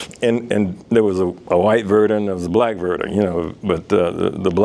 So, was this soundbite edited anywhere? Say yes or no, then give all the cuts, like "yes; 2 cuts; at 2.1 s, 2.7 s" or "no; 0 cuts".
no; 0 cuts